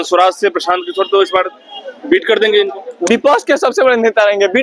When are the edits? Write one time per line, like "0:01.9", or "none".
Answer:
none